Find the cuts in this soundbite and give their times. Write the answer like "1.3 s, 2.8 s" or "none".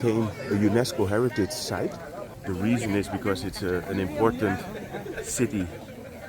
2.3 s